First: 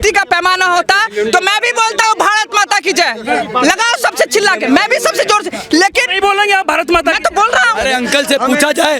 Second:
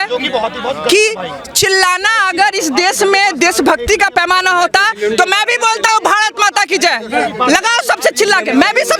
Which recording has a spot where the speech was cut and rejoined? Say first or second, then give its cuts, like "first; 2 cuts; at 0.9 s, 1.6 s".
first; 1 cut; at 7.8 s